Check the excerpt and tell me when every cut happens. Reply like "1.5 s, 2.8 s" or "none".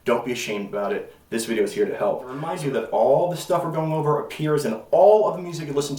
2.5 s